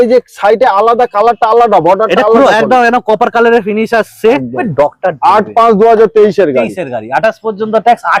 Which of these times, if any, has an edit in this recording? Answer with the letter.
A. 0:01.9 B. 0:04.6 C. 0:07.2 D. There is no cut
B